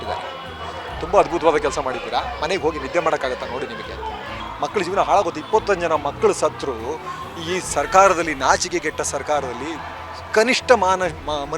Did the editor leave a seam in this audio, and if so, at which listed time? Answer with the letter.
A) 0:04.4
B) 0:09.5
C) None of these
A